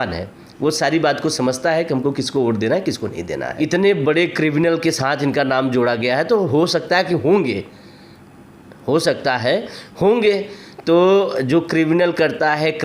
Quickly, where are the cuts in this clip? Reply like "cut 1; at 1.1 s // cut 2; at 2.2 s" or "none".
cut 1; at 3.5 s